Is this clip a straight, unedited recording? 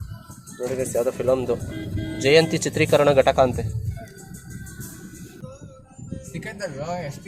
no; 1 cut; at 5.4 s

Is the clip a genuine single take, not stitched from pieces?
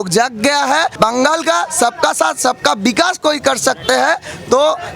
no; 1 cut; at 0.9 s

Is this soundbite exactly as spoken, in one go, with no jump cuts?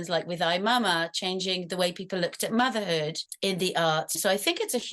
no; 1 cut; at 3.2 s

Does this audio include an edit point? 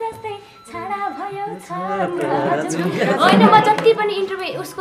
no; 0 cuts

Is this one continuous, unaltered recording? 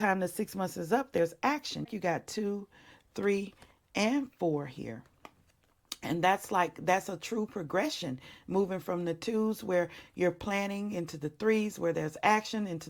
no; 1 cut; at 1.9 s

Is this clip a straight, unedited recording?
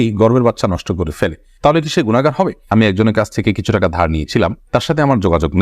no; 1 cut; at 2.7 s

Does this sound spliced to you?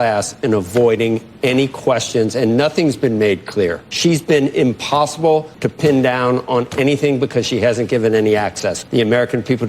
yes; 3 cuts; at 3.9 s, 5.6 s, 8.7 s

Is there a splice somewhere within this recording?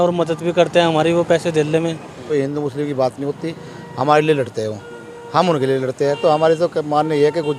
yes; 1 cut; at 2.3 s

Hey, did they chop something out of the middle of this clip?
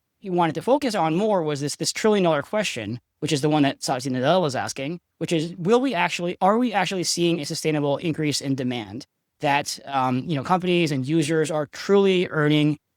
no; 0 cuts

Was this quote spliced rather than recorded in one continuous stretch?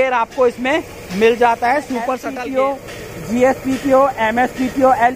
yes; 1 cut; at 2.2 s

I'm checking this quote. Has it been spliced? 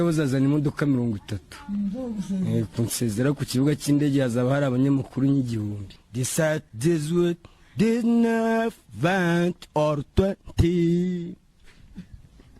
yes; 1 cut; at 5.9 s

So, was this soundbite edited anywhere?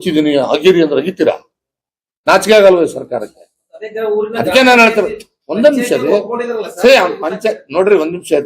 no; 0 cuts

